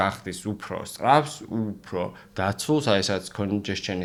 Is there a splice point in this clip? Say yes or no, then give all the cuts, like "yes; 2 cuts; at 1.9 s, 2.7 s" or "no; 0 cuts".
no; 0 cuts